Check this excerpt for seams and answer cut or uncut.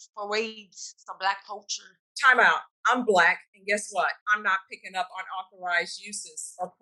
cut